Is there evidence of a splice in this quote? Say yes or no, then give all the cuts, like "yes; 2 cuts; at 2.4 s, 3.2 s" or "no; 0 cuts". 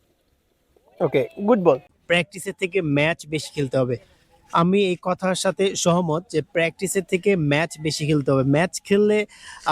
yes; 1 cut; at 1.9 s